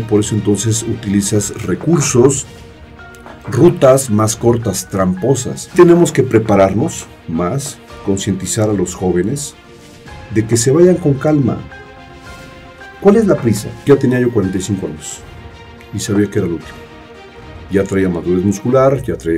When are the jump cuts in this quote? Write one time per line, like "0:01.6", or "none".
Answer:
0:05.7
0:13.8